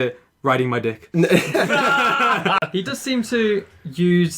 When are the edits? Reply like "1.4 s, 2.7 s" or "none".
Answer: 2.6 s